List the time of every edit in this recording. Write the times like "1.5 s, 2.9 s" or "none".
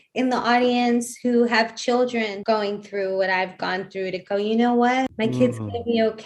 2.4 s, 5.1 s